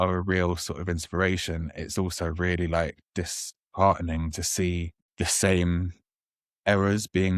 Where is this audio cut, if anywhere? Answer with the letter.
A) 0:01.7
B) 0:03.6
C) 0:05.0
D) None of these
C